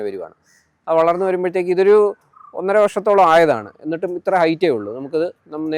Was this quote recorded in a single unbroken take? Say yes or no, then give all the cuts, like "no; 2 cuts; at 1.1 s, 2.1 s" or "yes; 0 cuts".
yes; 0 cuts